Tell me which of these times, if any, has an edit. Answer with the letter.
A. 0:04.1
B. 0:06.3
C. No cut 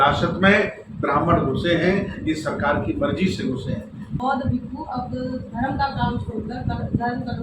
A